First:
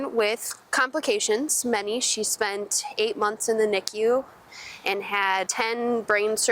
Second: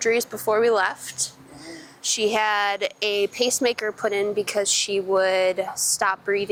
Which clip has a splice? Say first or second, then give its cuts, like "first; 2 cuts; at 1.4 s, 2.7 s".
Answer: first; 1 cut; at 5.5 s